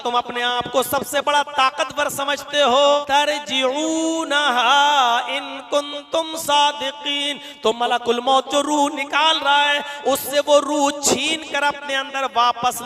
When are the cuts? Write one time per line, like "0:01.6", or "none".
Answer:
0:03.0